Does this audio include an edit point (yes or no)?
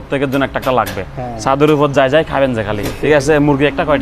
no